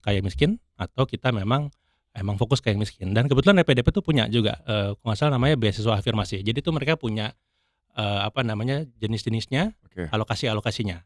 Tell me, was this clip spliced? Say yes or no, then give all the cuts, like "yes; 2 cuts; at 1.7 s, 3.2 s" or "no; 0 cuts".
no; 0 cuts